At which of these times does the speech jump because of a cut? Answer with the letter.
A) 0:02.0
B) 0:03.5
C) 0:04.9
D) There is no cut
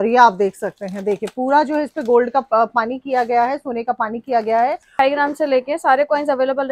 C